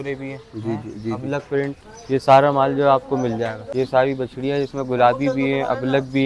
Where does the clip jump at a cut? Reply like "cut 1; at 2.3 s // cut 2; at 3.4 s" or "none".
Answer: cut 1; at 3.6 s